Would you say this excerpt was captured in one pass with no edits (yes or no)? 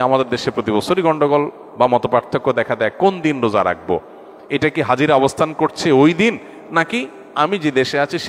yes